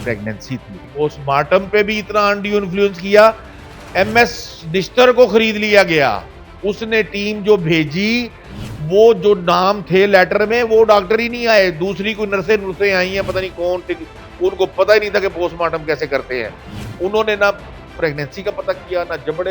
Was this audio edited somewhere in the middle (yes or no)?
yes